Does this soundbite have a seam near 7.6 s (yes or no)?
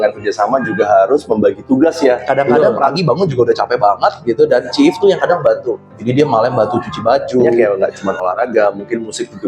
yes